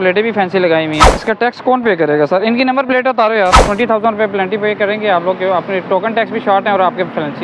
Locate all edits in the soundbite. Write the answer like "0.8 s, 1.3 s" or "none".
1.1 s, 3.6 s